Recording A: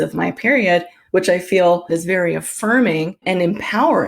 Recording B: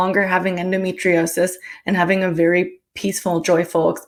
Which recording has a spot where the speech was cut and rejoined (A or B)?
A